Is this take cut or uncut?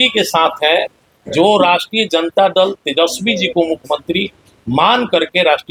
uncut